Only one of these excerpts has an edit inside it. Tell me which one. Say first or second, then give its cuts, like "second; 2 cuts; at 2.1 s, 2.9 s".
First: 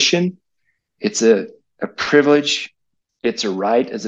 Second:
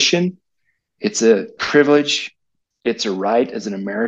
second; 1 cut; at 1.6 s